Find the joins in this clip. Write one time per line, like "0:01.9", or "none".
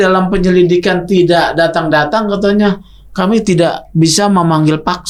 none